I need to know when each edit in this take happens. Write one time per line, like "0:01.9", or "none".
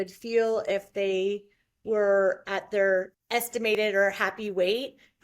0:03.7